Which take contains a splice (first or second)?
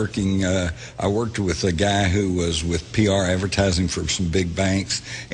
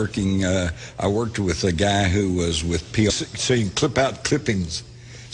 first